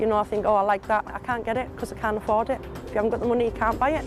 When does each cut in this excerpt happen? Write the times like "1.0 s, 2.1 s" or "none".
1.1 s, 2.8 s